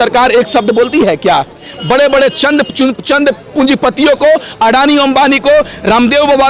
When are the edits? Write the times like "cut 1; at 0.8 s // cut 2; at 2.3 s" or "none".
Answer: cut 1; at 1.7 s